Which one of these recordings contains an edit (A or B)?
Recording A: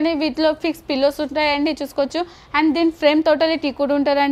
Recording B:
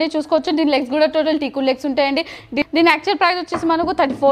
B